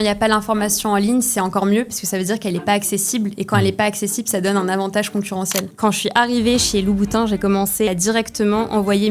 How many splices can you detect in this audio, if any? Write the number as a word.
two